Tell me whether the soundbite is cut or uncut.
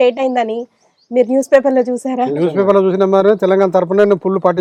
uncut